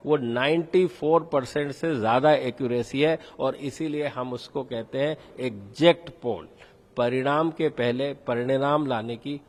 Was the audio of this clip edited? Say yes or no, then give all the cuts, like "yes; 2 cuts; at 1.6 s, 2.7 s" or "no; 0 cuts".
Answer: no; 0 cuts